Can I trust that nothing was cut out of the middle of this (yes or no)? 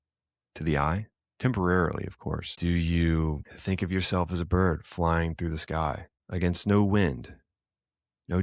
no